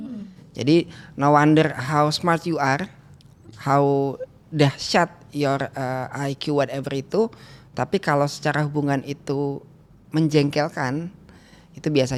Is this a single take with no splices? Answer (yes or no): yes